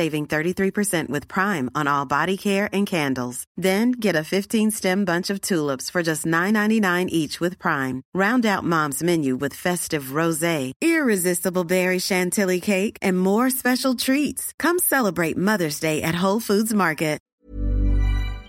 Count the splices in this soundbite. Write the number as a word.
one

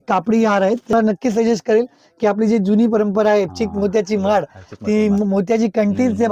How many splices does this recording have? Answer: one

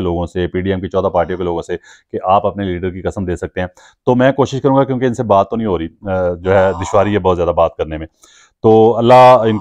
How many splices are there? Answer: zero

